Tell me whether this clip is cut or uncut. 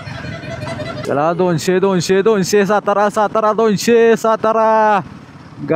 cut